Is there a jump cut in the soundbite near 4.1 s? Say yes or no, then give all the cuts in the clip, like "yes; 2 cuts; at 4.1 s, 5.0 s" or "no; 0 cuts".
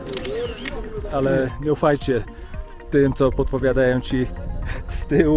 no; 1 cut; at 1.1 s